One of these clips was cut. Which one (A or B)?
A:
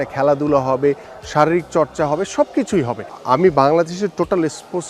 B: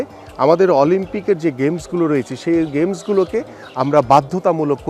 A